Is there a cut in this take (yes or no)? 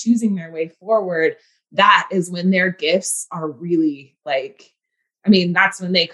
no